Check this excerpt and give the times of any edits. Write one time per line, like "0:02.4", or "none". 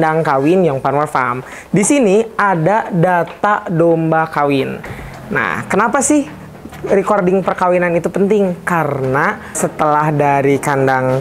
0:09.6